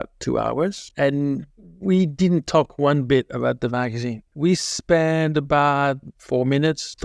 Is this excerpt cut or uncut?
uncut